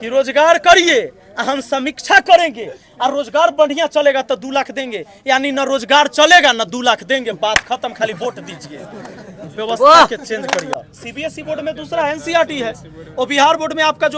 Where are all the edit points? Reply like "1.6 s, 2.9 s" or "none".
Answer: 10.8 s